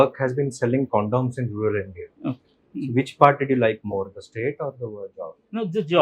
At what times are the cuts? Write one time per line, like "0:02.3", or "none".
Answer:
none